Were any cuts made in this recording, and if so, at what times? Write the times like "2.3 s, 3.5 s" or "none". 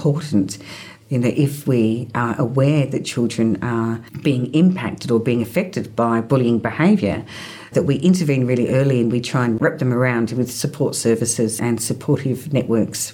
0.9 s, 4.1 s, 11.6 s